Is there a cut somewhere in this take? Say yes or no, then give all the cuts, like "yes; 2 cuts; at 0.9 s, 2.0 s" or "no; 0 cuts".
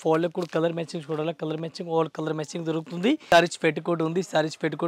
yes; 1 cut; at 3.2 s